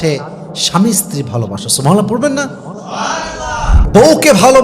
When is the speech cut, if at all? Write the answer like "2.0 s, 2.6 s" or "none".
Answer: 3.7 s